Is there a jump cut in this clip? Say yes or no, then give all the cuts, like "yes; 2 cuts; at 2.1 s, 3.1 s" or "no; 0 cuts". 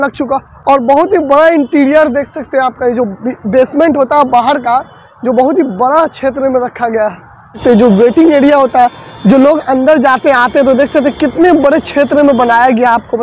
no; 0 cuts